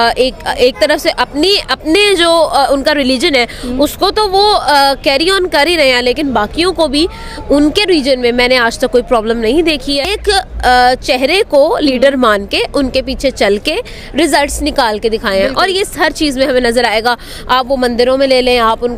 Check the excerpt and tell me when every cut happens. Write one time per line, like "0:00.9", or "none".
0:10.1